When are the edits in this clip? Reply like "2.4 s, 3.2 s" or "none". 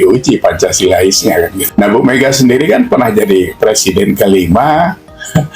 1.6 s